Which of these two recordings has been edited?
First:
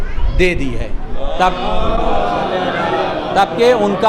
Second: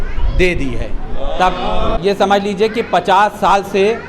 second; 1 cut; at 2.0 s

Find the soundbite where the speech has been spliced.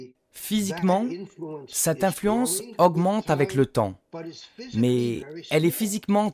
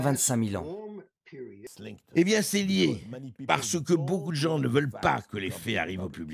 second; 1 cut; at 1.7 s

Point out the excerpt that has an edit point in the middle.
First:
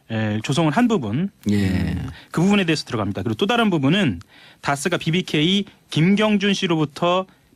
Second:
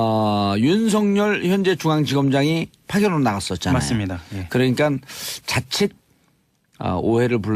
second; 1 cut; at 2.1 s

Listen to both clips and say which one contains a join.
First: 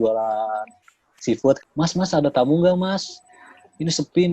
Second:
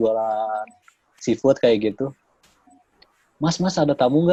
first; 1 cut; at 1.6 s

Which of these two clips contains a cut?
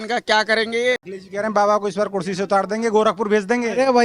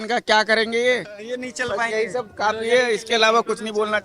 first; 1 cut; at 1.1 s

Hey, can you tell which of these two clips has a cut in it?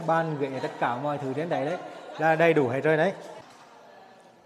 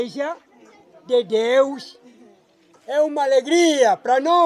first; 1 cut; at 3.4 s

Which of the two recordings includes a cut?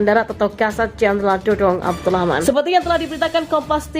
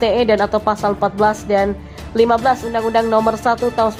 first; 1 cut; at 2.5 s

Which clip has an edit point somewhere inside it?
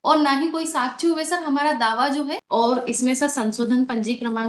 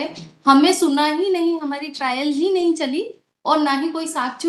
first; 1 cut; at 2.4 s

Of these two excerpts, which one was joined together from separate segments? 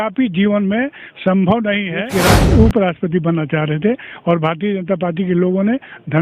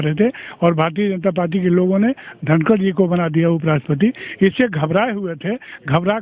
first; 1 cut; at 2.1 s

